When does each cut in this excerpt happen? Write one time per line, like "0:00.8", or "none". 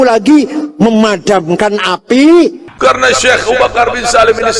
0:02.7